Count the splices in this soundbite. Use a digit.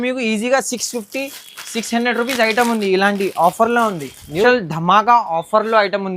1